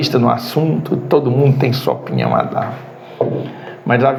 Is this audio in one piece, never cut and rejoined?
yes; 0 cuts

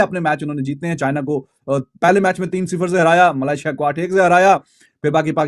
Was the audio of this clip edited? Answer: no; 0 cuts

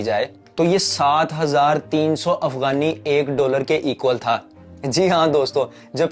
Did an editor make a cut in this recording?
no; 0 cuts

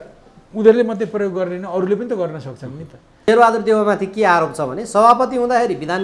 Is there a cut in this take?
yes; 1 cut; at 3.3 s

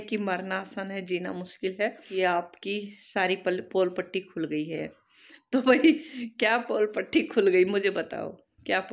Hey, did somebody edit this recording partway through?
yes; 1 cut; at 2.1 s

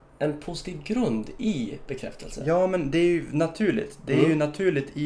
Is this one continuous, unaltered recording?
yes; 0 cuts

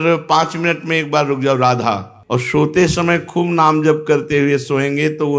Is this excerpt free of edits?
no; 1 cut; at 2.1 s

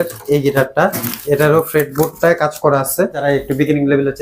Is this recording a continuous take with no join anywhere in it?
no; 1 cut; at 3.2 s

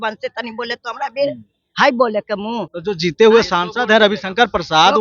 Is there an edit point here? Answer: yes; 1 cut; at 2.7 s

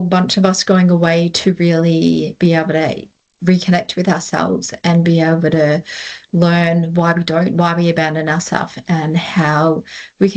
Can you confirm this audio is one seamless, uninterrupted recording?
yes; 0 cuts

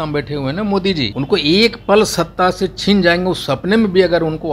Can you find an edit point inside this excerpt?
yes; 1 cut; at 1.1 s

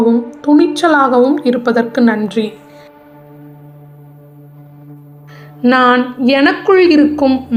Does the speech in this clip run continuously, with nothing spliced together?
yes; 0 cuts

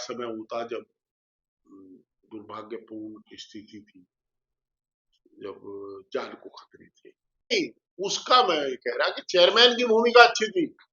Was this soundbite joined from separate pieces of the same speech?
yes; 1 cut; at 7.5 s

